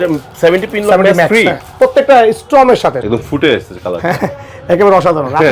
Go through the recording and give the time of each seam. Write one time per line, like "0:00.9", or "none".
0:03.0